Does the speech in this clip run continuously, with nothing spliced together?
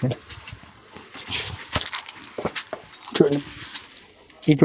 no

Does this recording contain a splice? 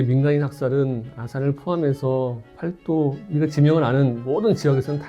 yes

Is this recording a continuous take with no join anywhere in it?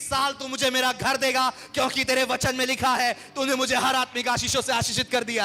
yes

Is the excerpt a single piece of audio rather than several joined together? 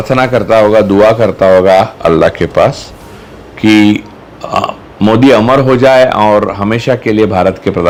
yes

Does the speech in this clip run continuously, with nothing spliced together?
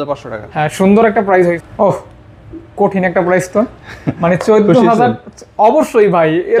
no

